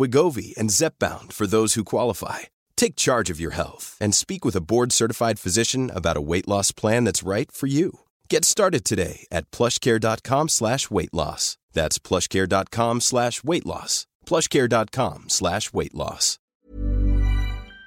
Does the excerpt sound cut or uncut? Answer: cut